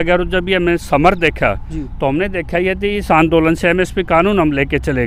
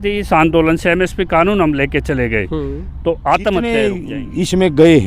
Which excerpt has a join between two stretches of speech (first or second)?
second